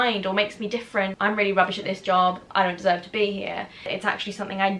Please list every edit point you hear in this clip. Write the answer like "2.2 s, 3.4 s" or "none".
1.1 s, 3.9 s